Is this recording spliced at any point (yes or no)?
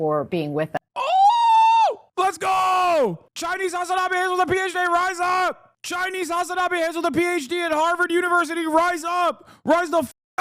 no